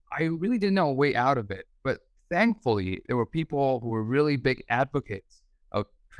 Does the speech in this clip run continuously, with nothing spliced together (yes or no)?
yes